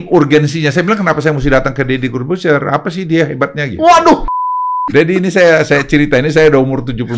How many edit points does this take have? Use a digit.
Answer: 1